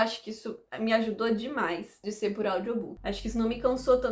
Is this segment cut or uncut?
uncut